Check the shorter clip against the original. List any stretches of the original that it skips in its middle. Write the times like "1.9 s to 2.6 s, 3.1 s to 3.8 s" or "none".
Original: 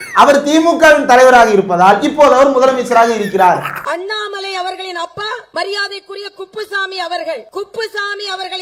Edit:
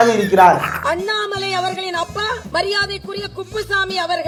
none